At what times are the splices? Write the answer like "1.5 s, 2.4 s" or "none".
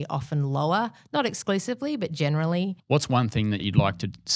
2.8 s, 3.6 s